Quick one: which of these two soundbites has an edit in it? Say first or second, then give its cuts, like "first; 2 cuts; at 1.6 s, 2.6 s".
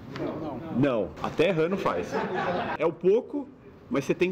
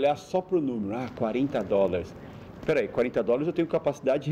first; 2 cuts; at 1.2 s, 2.7 s